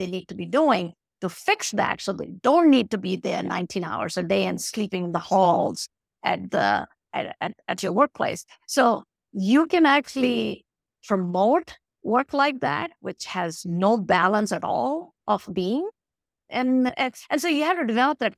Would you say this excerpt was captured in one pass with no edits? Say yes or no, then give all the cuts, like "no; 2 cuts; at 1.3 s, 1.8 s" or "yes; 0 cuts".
yes; 0 cuts